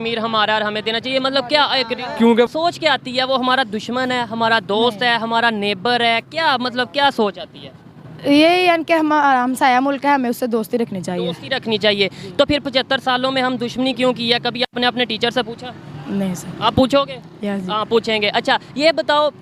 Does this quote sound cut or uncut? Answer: cut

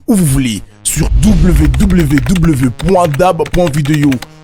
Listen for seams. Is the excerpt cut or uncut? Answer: uncut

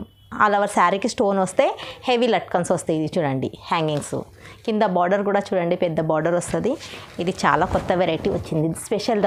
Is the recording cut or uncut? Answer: uncut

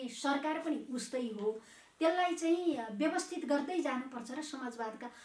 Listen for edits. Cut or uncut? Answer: uncut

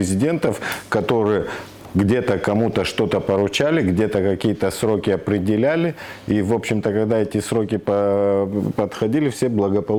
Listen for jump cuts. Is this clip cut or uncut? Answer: uncut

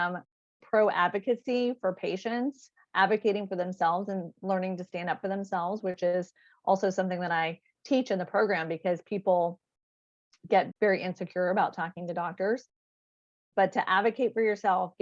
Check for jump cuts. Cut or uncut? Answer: cut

